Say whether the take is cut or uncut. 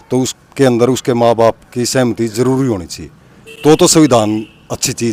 uncut